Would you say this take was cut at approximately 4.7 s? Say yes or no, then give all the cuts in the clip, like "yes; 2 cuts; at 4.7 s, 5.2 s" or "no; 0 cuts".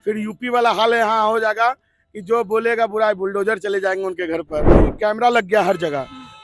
yes; 1 cut; at 4.7 s